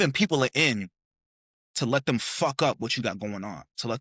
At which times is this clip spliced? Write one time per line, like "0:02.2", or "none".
none

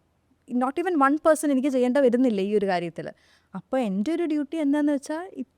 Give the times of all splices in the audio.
none

